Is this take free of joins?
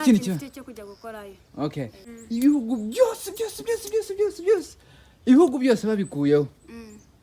no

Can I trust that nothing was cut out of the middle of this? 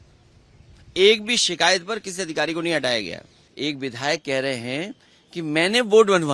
no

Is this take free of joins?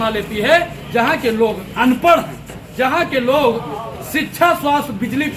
yes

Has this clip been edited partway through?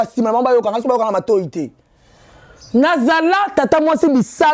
no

